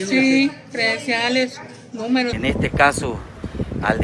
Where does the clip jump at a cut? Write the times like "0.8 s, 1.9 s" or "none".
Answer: 2.4 s